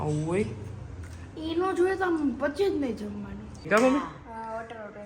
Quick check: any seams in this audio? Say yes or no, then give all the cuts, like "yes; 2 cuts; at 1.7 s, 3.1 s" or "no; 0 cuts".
yes; 1 cut; at 3.7 s